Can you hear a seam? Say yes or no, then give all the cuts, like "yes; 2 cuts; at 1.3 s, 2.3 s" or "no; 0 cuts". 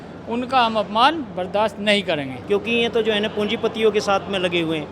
yes; 1 cut; at 2.4 s